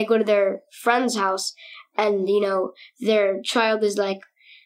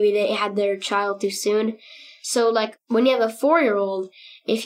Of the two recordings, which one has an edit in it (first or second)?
second